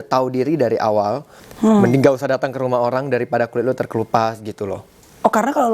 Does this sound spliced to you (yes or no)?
yes